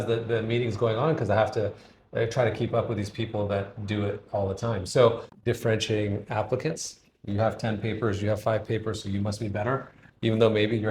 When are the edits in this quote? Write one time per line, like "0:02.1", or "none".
0:05.3